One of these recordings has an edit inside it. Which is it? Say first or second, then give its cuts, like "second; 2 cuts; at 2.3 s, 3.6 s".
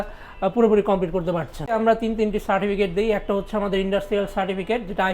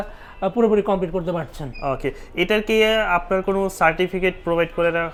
first; 1 cut; at 1.8 s